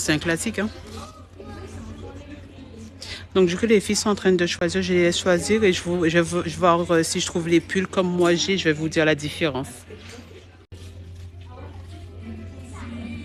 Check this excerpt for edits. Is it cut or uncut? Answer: uncut